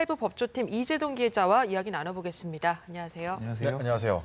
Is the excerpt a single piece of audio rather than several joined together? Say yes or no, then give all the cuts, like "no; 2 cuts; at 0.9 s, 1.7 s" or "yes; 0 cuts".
yes; 0 cuts